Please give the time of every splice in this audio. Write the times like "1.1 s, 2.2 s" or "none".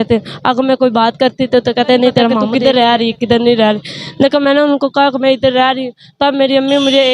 2.4 s